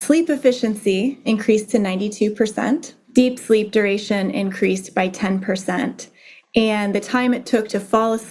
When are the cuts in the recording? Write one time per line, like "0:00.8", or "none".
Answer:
0:01.2
0:03.0

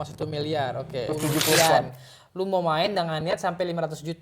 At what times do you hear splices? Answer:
0:01.1

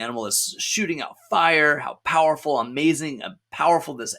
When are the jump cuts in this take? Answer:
none

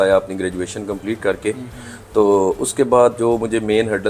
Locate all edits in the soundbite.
none

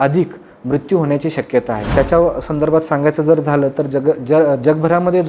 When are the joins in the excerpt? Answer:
0:01.9

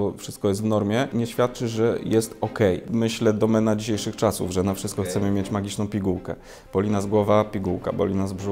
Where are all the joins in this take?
0:01.1
0:02.8

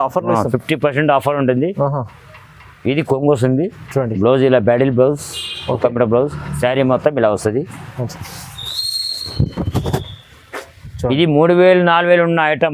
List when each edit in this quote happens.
none

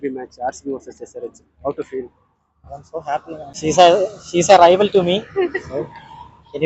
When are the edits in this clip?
0:03.5

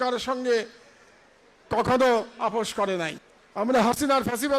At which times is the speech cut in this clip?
0:03.2

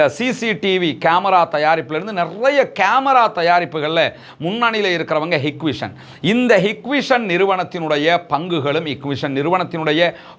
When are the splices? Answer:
none

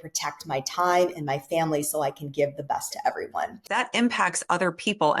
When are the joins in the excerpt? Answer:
0:03.7

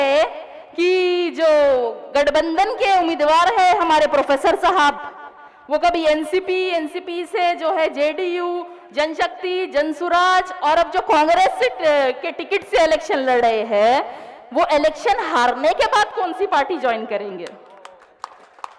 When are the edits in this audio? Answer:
none

